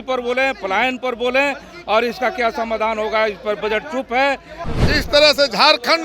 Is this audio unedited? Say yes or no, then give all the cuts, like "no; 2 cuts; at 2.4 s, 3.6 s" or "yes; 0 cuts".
no; 1 cut; at 4.6 s